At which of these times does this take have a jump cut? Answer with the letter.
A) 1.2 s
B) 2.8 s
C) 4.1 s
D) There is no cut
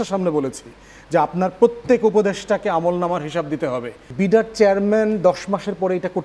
C